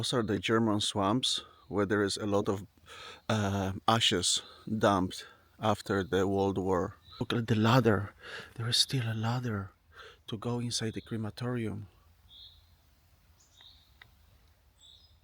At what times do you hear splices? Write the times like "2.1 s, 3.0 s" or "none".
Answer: 7.3 s

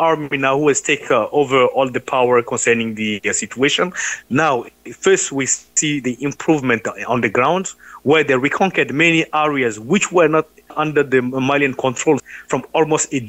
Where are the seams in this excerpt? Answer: 10.8 s, 12.2 s

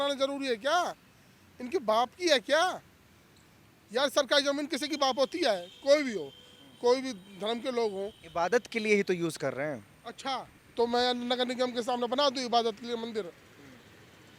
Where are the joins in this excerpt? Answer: none

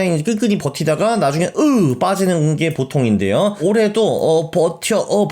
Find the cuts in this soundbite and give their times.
3.6 s

